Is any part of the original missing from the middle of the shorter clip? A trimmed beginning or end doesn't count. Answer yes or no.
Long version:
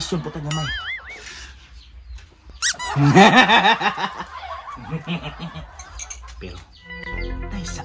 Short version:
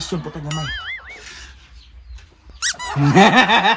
no